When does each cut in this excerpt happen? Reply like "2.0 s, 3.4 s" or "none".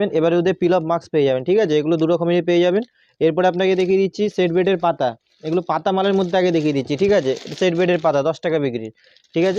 none